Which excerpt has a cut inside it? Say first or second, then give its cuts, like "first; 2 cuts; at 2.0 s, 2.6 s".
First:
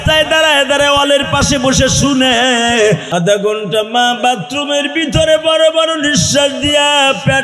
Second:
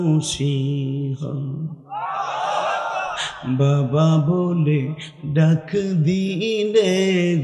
first; 1 cut; at 3.0 s